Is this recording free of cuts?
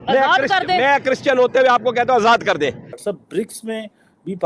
no; 1 cut; at 2.9 s

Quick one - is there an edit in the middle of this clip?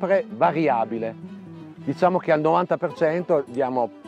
no; 0 cuts

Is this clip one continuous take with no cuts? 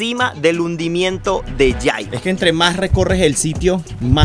no; 1 cut; at 2.1 s

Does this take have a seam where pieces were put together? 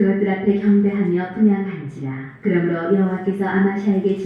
yes; 1 cut; at 2.3 s

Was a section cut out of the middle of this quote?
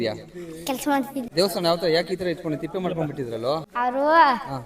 yes; 2 cuts; at 1.3 s, 3.7 s

